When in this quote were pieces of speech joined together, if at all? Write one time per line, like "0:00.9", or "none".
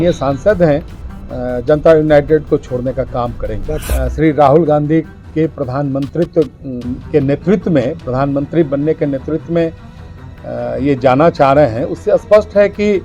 0:03.8